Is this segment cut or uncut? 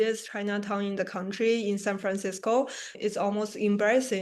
cut